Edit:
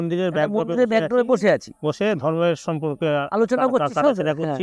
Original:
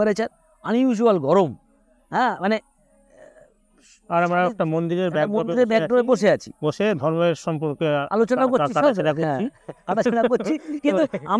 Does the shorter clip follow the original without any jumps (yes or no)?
yes